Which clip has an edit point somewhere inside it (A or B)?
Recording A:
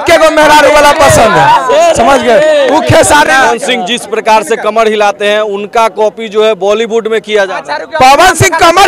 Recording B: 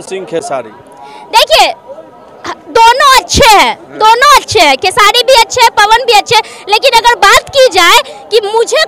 A